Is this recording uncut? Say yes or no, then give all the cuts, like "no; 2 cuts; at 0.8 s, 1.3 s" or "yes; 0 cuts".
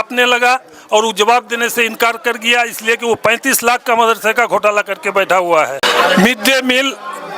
no; 1 cut; at 5.8 s